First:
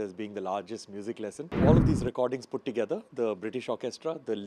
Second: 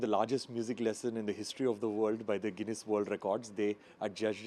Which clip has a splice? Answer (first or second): first